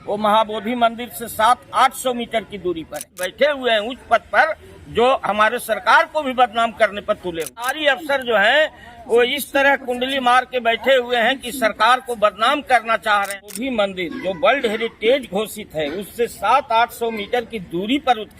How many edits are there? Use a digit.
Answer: 3